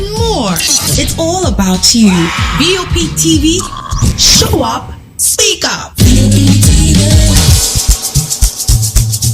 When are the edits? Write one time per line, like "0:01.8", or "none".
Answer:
0:07.4